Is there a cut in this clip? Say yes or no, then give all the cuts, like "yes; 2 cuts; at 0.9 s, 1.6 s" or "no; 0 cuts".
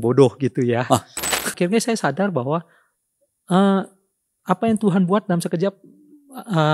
yes; 1 cut; at 1.5 s